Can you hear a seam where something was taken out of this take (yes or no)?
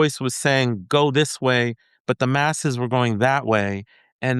no